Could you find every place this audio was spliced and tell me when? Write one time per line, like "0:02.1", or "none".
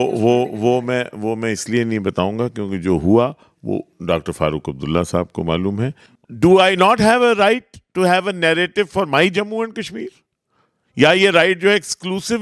0:06.1